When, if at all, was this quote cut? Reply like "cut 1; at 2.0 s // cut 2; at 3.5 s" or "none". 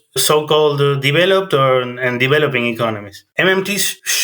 cut 1; at 3.2 s

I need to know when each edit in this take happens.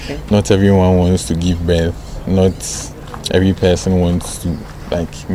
none

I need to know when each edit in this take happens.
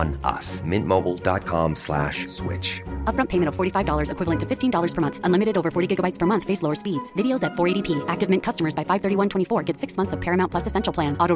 none

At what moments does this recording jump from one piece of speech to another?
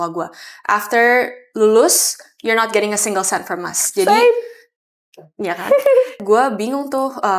cut 1; at 6.2 s

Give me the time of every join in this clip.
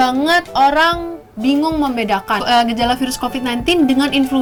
none

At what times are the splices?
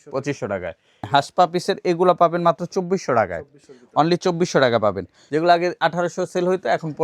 cut 1; at 1.1 s // cut 2; at 5.1 s

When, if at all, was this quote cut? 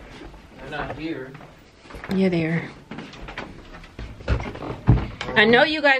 cut 1; at 4.1 s

